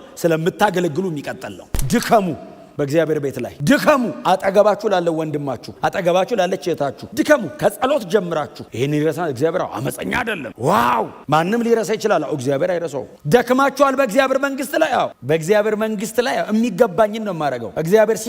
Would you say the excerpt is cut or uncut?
cut